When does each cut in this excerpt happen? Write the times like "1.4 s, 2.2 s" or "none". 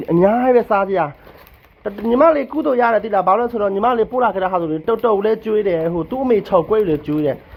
none